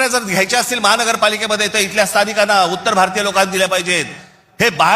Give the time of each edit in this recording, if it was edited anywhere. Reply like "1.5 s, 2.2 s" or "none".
none